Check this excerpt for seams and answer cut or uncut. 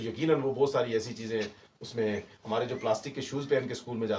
uncut